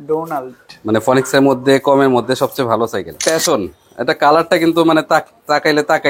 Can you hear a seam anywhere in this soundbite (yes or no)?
yes